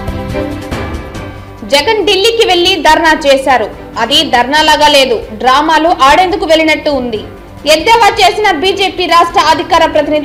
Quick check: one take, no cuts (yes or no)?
yes